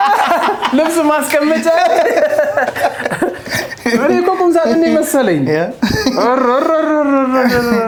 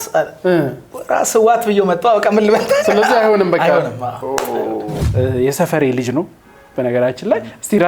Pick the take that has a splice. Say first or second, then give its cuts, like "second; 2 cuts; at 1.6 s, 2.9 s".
second; 1 cut; at 5.0 s